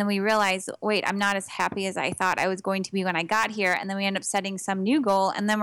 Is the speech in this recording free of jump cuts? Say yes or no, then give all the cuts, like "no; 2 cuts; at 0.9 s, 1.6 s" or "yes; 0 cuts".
yes; 0 cuts